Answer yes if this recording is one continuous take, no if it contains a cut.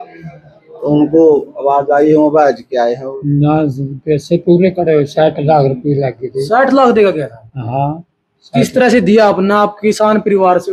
no